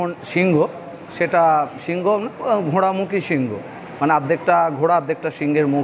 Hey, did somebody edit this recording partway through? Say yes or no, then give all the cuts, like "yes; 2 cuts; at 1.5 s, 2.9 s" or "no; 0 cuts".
no; 0 cuts